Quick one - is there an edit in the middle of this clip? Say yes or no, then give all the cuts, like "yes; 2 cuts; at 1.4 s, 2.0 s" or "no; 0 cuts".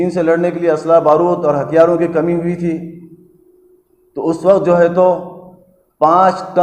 no; 0 cuts